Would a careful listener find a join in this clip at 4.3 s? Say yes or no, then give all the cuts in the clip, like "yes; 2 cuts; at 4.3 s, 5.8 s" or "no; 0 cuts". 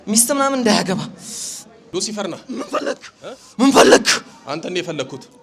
no; 1 cut; at 1.7 s